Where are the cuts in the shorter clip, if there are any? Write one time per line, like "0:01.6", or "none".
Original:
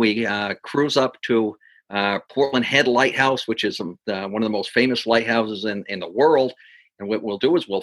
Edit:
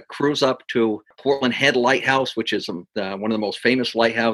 0:01.1